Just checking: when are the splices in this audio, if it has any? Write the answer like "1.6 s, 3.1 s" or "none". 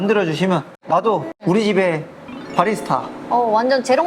1.0 s